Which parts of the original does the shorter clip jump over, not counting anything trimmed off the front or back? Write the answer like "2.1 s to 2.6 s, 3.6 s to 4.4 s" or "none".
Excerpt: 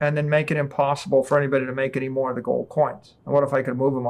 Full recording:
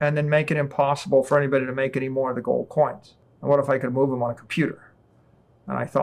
3.1 s to 3.2 s